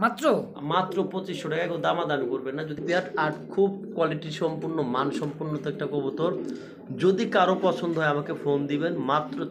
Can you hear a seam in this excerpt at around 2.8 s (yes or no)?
yes